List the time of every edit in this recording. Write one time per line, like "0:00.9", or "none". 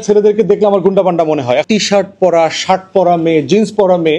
0:01.6